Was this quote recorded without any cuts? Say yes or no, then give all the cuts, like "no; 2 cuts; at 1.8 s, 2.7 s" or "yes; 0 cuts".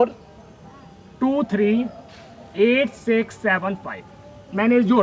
yes; 0 cuts